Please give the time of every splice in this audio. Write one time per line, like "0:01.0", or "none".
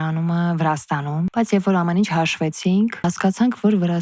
0:01.3
0:03.0